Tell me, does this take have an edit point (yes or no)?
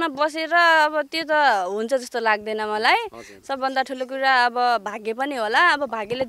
no